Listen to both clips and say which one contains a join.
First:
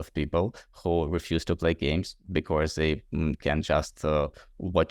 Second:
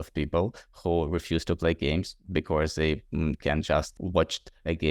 second; 1 cut; at 3.9 s

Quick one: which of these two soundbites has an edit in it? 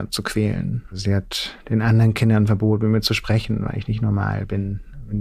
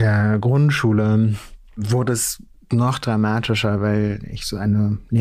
first; 1 cut; at 0.9 s

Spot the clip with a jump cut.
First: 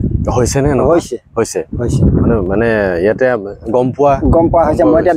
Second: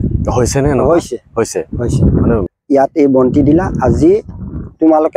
second; 1 cut; at 2.5 s

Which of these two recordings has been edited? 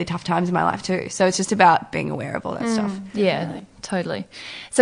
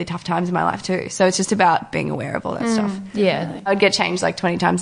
second; 1 cut; at 3.7 s

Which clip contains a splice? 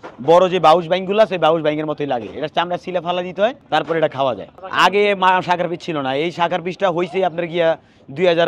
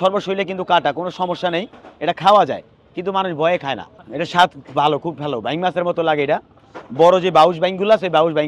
first; 2 cuts; at 3.6 s, 4.5 s

